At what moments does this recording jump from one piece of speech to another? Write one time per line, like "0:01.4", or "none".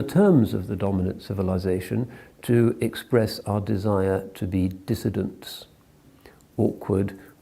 0:06.2